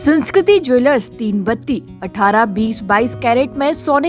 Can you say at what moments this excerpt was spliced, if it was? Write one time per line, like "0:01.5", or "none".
none